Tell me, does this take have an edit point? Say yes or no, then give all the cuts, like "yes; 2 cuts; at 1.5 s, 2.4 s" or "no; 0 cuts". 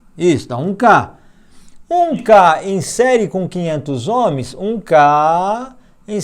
no; 0 cuts